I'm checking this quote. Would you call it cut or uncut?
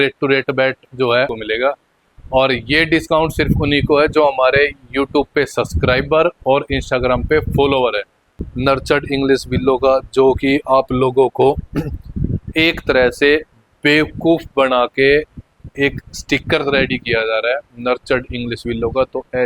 cut